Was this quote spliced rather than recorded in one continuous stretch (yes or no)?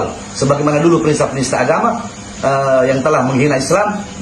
no